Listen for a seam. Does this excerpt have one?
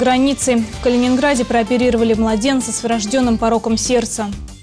no; 0 cuts

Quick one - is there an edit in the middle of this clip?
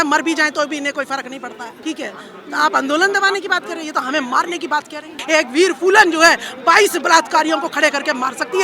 yes; 2 cuts; at 1.7 s, 5.2 s

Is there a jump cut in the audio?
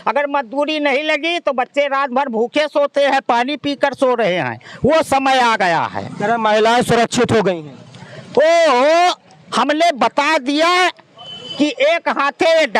no; 0 cuts

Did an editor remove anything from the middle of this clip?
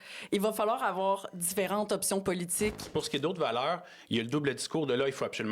yes; 1 cut; at 2.9 s

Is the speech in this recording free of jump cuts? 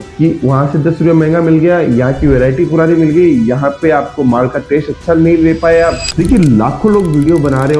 no; 1 cut; at 6.1 s

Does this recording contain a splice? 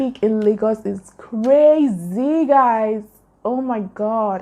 no; 0 cuts

